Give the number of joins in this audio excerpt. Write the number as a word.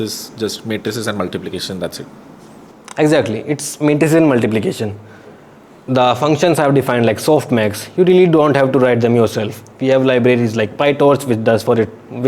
zero